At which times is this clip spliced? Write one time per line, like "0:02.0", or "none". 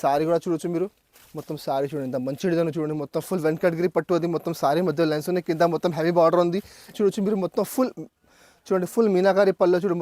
0:06.9